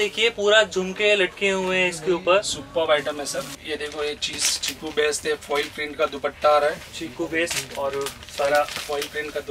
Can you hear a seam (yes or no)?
yes